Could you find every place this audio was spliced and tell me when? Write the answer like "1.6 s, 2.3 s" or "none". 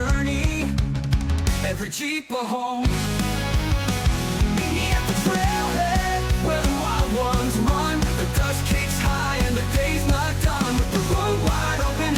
none

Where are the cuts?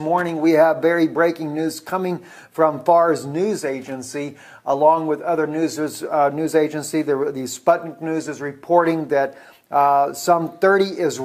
8.0 s

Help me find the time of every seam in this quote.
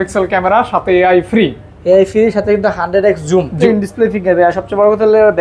3.5 s

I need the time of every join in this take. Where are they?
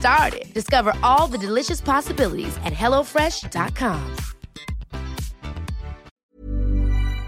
6.1 s

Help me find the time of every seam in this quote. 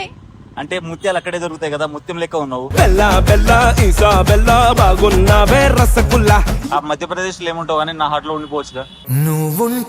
6.6 s

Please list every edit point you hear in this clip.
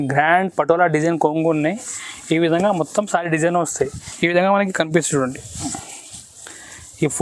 4.0 s

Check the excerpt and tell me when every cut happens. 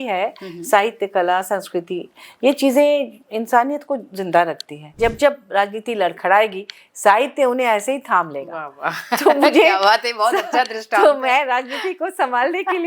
4.9 s

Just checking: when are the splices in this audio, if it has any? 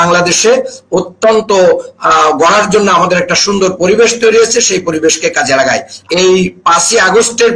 5.9 s

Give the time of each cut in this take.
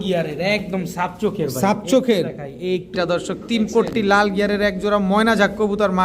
2.9 s

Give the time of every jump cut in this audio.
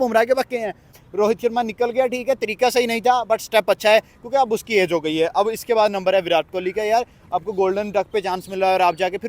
0.9 s

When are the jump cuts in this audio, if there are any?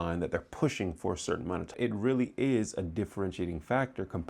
1.7 s

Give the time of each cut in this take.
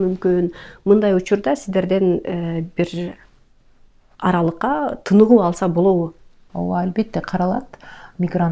none

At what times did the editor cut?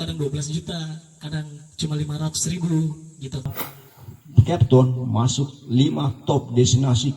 3.5 s

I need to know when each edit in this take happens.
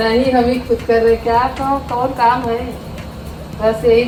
none

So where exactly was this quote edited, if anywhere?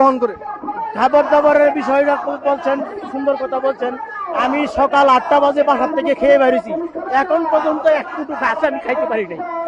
none

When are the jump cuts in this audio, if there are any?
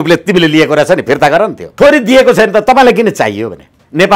1.7 s

